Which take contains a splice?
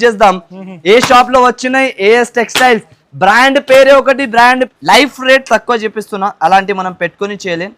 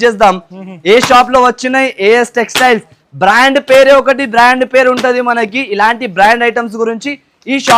first; 1 cut; at 4.7 s

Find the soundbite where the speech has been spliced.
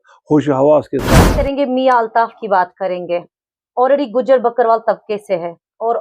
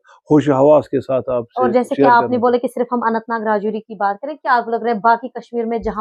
first; 1 cut; at 1.3 s

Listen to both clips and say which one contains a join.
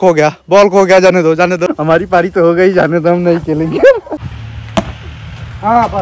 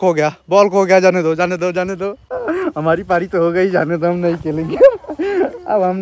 first; 2 cuts; at 1.7 s, 4.1 s

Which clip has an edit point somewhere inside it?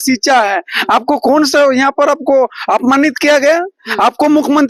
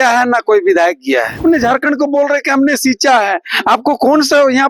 second; 1 cut; at 1.4 s

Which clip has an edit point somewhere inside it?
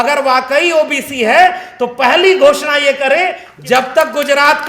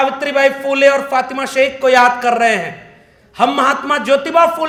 first; 1 cut; at 3.5 s

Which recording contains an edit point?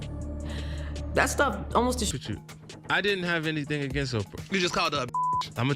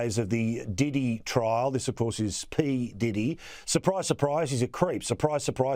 first; 1 cut; at 2.3 s

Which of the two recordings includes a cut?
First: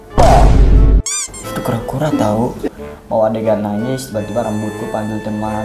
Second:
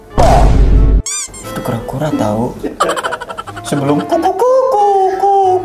first; 1 cut; at 2.7 s

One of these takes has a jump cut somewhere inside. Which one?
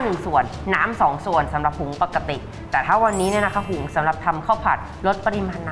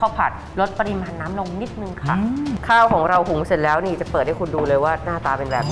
second; 1 cut; at 2.6 s

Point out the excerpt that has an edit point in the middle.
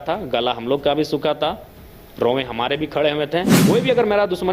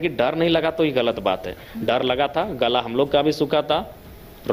first; 1 cut; at 3.5 s

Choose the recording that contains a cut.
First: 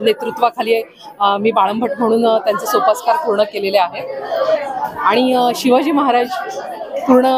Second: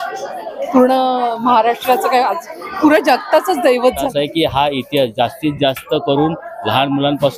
second; 1 cut; at 4.1 s

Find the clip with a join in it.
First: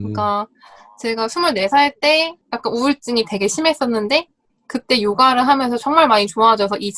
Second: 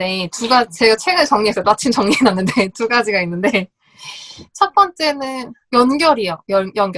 first; 1 cut; at 2.4 s

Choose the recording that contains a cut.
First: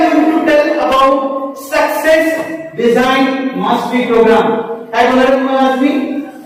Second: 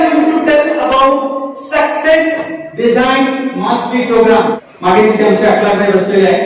second; 1 cut; at 4.7 s

